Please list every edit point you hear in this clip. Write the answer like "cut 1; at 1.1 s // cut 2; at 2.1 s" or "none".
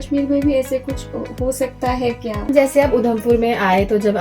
cut 1; at 2.5 s